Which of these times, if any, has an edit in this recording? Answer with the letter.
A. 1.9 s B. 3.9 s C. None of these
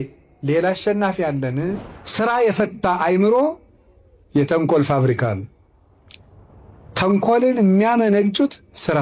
A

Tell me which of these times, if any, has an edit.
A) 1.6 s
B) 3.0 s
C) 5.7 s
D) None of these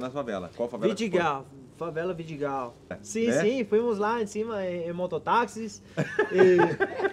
B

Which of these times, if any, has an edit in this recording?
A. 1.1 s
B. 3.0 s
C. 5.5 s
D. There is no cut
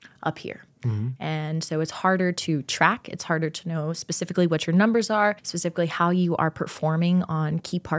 C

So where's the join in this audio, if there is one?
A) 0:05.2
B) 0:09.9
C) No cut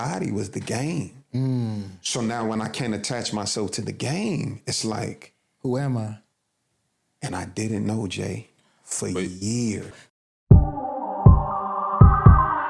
B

